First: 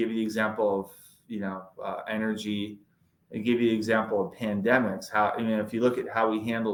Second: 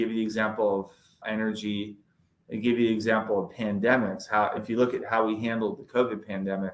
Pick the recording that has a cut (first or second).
second